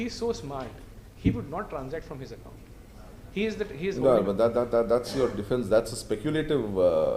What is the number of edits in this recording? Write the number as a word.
zero